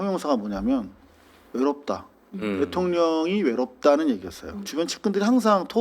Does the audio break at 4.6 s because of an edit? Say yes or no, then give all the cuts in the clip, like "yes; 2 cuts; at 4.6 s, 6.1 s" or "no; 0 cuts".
yes; 1 cut; at 4.6 s